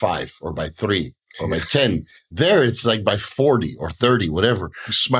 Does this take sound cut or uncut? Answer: uncut